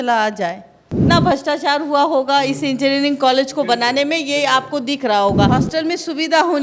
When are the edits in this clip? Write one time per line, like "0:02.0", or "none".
0:01.0
0:05.5